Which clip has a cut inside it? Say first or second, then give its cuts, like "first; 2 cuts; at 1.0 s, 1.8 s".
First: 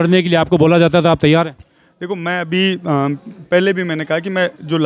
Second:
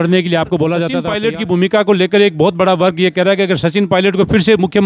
second; 1 cut; at 1.1 s